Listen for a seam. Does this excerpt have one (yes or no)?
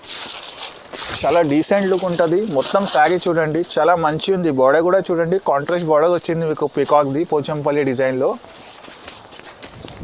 no